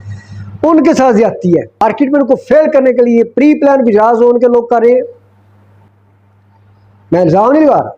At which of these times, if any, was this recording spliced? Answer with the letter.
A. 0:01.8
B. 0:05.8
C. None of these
A